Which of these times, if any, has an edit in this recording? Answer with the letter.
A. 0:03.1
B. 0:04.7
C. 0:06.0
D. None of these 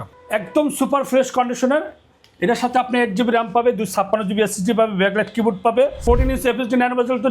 C